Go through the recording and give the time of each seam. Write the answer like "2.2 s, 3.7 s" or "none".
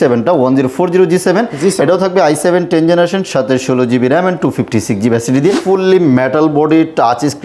5.6 s